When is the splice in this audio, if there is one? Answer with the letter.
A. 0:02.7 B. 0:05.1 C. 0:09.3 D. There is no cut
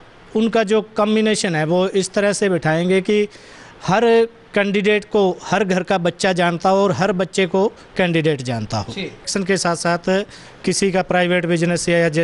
C